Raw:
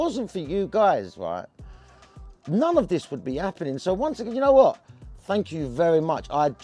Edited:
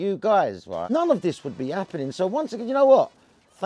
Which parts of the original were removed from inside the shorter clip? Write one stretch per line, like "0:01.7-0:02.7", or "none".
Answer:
0:01.4-0:02.6